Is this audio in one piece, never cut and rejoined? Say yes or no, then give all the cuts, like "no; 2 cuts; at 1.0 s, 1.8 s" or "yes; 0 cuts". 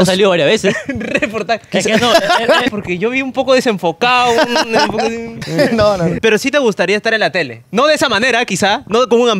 no; 3 cuts; at 2.7 s, 5.3 s, 6.2 s